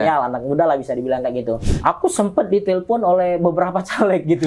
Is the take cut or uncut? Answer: cut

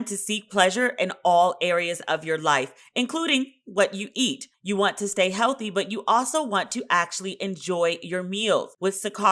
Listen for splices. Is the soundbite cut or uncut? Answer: uncut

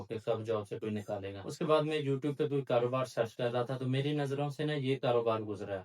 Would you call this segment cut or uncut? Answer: cut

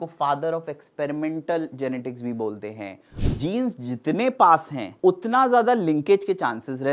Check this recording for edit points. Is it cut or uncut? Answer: cut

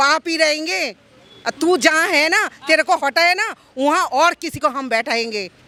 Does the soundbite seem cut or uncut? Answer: uncut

